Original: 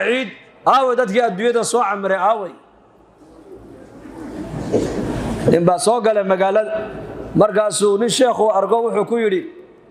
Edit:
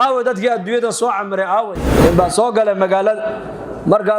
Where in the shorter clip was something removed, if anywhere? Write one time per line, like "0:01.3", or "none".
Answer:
0:01.9